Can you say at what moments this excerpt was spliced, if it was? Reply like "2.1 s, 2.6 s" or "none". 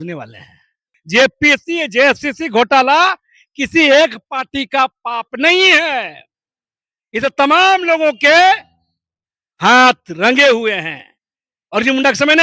0.9 s